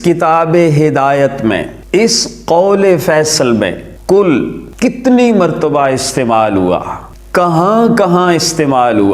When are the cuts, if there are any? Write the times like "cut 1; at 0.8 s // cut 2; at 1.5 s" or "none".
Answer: cut 1; at 1.7 s // cut 2; at 3.9 s // cut 3; at 4.6 s